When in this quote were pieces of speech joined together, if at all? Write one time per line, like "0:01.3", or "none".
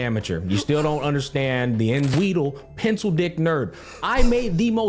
0:02.1